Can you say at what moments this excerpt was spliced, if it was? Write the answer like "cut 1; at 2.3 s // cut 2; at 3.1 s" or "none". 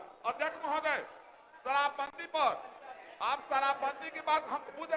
none